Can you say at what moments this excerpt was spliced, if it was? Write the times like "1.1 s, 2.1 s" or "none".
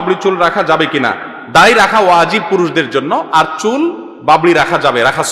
none